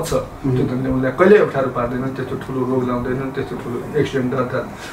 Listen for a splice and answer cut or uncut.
uncut